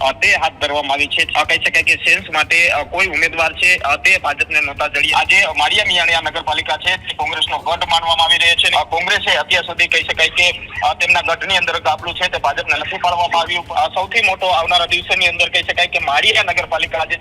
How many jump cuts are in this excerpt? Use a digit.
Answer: 4